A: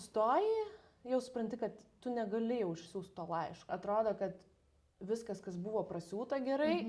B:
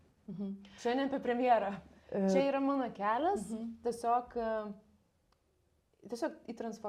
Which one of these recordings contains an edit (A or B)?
A